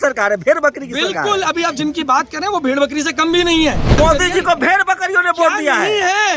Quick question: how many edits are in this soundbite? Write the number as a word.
one